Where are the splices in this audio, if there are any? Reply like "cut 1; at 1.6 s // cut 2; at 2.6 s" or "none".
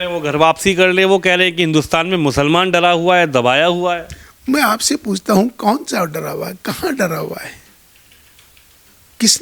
none